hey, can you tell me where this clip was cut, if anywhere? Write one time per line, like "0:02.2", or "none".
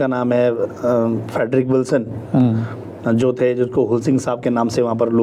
none